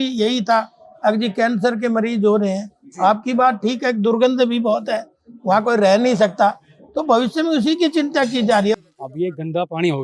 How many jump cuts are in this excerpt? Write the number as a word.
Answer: one